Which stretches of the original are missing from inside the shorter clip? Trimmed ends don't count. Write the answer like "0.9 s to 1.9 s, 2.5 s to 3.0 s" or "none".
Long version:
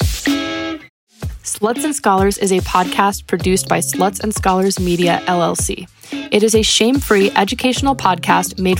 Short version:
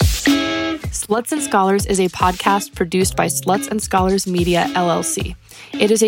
0.9 s to 1.4 s